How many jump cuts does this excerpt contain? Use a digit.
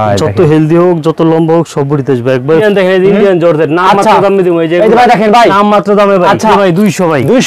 2